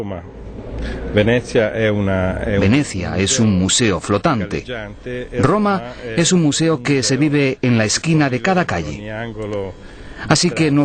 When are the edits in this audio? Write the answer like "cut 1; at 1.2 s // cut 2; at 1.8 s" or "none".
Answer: none